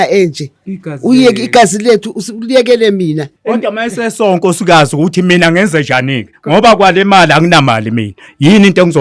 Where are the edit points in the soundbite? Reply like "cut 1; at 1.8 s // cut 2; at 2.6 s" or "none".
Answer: cut 1; at 3.3 s